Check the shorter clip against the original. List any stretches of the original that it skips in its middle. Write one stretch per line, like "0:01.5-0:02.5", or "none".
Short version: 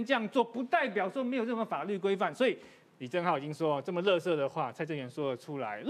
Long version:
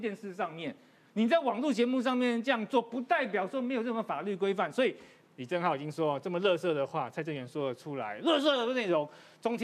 none